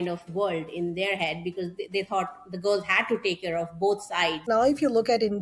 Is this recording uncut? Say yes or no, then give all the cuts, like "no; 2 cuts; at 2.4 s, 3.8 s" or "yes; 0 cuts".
no; 1 cut; at 4.4 s